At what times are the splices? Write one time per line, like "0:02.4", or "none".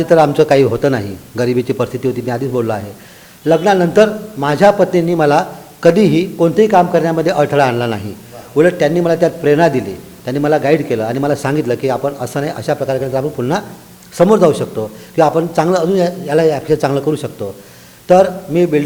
none